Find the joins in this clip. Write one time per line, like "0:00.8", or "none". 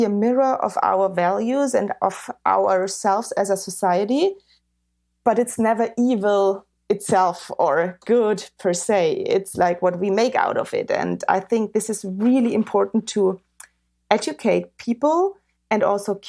none